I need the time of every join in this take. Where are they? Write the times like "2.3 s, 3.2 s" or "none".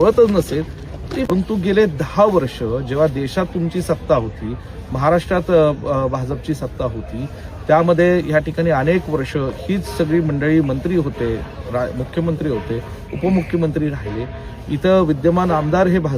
1.2 s